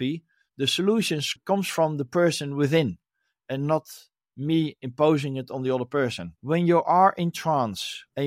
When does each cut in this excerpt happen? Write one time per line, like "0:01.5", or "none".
0:01.3
0:06.3